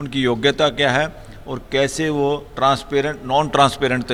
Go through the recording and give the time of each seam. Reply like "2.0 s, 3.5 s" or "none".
none